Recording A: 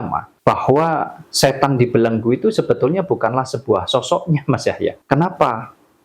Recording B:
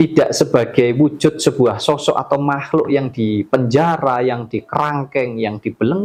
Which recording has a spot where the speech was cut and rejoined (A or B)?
A